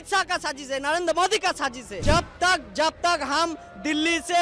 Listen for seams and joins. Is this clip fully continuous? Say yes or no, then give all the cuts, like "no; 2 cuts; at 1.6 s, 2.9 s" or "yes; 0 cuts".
no; 1 cut; at 1.9 s